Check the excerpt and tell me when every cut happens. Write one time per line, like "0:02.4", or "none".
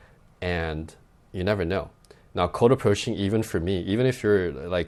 none